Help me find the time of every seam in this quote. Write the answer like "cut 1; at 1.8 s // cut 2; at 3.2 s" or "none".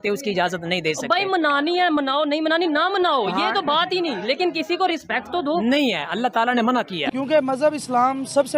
cut 1; at 7.0 s